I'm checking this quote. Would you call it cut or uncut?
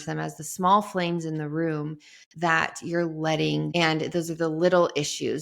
cut